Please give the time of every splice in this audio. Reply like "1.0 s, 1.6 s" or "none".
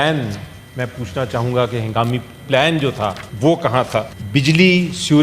3.2 s, 4.2 s